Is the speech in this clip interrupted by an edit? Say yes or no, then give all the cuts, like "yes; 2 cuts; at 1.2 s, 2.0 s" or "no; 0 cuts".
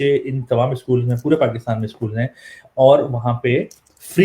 no; 0 cuts